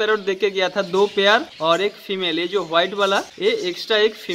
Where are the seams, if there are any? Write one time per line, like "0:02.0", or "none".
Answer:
0:01.5
0:03.3

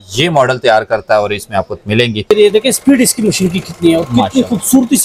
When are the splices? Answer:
0:02.2

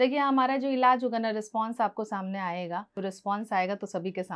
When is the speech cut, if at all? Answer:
0:03.0

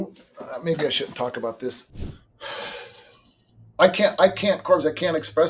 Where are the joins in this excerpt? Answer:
0:01.9

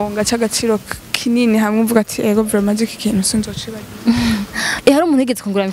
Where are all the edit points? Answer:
0:04.7

